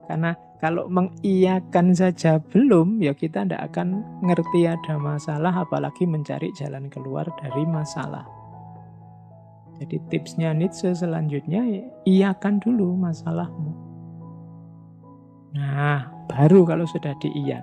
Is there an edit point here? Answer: yes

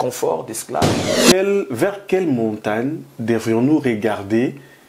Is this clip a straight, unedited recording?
no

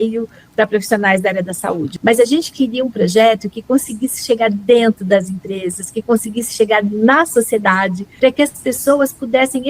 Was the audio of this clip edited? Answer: yes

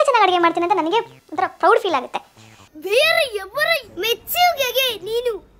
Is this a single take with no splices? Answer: yes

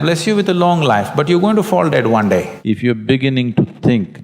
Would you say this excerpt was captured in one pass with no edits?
no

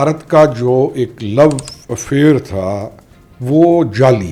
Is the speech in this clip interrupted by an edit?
no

